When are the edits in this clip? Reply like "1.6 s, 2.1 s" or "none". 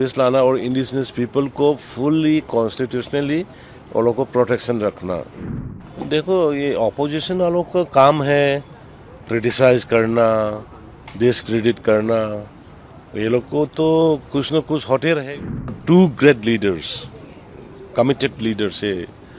5.3 s, 15.7 s